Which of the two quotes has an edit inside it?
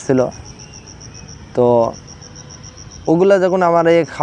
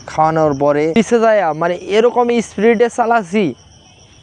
second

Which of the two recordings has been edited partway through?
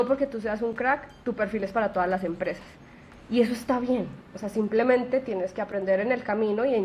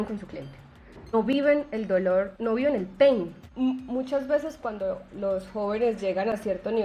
second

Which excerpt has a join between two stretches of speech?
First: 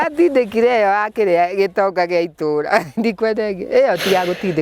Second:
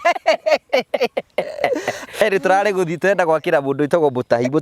second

